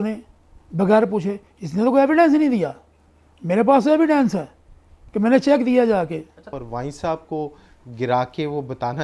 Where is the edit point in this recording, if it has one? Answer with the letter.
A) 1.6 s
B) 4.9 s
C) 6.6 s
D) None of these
C